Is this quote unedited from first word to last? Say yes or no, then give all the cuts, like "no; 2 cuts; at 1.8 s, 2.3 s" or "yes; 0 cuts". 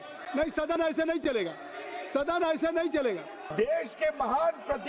no; 1 cut; at 3.5 s